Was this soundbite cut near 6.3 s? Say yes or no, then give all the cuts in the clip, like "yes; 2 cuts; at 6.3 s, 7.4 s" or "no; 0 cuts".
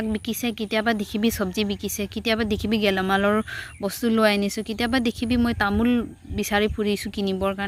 no; 0 cuts